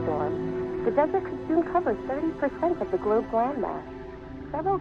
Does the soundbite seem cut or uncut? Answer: uncut